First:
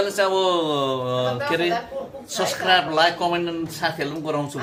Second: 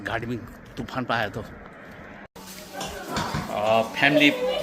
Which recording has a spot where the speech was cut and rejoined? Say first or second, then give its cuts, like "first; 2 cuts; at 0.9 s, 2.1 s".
second; 1 cut; at 2.4 s